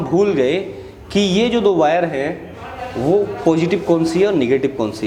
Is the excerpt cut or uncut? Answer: uncut